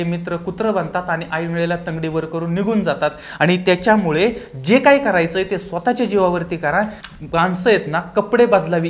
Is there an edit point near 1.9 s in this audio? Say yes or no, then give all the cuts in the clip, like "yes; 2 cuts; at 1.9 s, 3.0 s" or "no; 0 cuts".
no; 1 cut; at 7.1 s